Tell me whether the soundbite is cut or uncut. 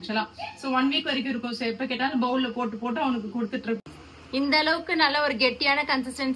cut